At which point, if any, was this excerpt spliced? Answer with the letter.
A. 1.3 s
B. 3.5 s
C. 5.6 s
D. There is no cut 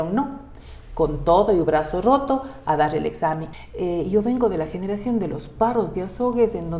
B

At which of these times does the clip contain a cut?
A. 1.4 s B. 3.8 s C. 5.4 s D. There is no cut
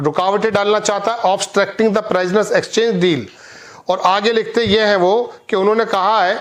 D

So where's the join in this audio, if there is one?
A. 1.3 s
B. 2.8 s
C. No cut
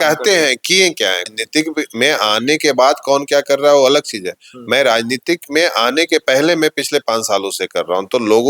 A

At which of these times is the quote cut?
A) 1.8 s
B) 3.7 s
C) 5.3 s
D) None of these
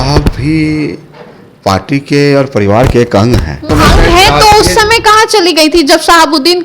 B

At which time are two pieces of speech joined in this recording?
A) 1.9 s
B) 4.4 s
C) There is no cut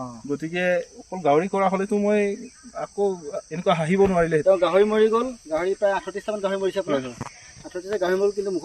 B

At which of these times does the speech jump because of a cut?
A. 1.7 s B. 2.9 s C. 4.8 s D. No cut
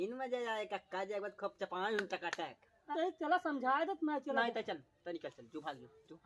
B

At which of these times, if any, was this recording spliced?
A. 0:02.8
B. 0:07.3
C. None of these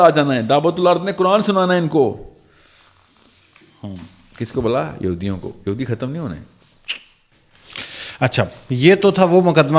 C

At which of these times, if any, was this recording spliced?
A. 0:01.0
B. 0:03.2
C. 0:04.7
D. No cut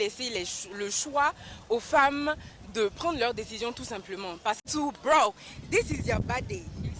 C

